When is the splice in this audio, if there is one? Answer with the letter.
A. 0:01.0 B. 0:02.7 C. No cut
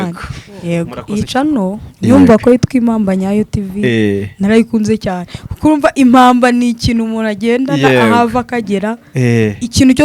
A